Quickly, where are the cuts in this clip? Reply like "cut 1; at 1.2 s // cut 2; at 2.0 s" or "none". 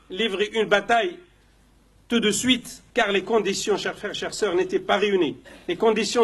none